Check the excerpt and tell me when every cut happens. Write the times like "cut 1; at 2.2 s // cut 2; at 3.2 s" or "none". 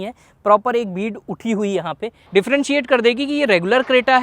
cut 1; at 2.2 s

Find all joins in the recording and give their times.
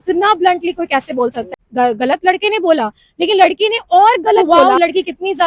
cut 1; at 1.5 s // cut 2; at 4.4 s

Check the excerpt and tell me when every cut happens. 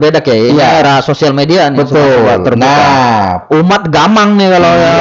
none

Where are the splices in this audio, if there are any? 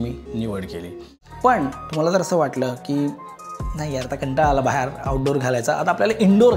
cut 1; at 1.1 s

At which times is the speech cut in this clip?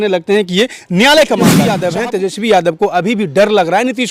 cut 1; at 1.5 s

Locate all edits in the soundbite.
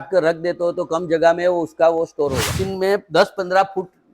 cut 1; at 2.6 s

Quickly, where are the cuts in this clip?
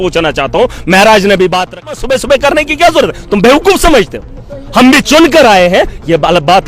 cut 1; at 2.0 s

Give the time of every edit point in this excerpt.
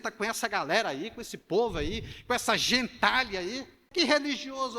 cut 1; at 3.8 s

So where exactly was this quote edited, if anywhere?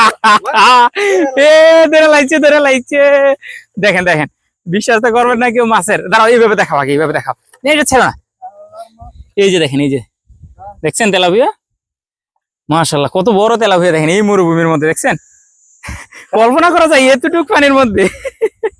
none

